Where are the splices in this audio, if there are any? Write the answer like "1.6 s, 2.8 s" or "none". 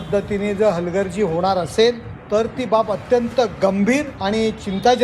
2.1 s, 4.1 s